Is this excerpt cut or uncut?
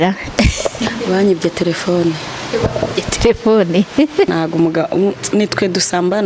cut